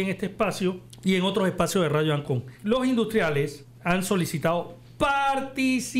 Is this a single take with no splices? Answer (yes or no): no